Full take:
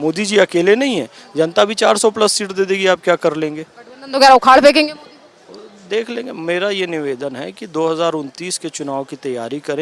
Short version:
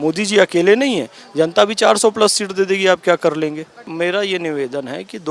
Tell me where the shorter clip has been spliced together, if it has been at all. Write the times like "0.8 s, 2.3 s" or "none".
3.8 s